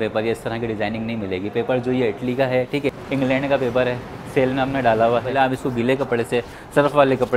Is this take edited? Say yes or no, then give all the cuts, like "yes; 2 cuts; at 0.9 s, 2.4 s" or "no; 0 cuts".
yes; 2 cuts; at 3.0 s, 5.3 s